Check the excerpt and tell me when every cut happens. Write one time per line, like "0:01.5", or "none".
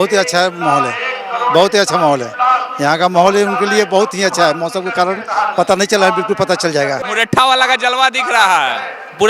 0:07.1